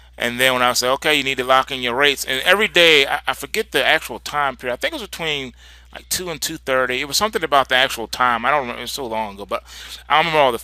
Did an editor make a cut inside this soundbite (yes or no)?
yes